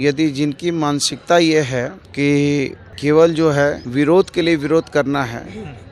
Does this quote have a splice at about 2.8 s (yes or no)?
yes